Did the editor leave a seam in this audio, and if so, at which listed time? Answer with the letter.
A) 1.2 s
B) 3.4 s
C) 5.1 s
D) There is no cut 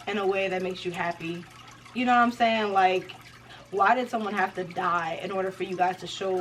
B